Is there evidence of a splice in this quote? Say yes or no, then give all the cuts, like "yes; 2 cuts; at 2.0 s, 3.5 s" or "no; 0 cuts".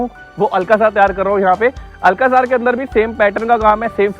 no; 0 cuts